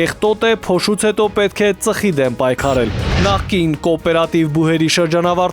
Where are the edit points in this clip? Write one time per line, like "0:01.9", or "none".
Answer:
0:03.2